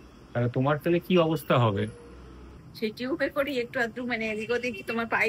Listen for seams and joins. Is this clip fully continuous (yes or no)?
no